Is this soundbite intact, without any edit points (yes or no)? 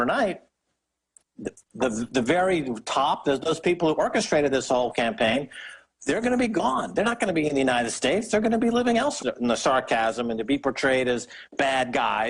yes